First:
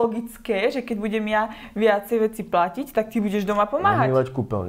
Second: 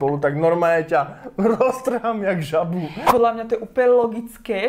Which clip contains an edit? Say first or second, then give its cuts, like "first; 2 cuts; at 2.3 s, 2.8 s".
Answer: second; 1 cut; at 3.0 s